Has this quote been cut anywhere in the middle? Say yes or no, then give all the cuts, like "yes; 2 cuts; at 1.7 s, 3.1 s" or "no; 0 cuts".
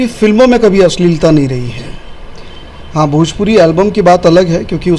no; 0 cuts